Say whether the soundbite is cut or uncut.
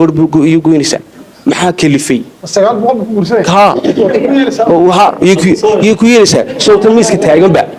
uncut